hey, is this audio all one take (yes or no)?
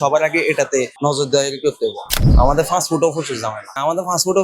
no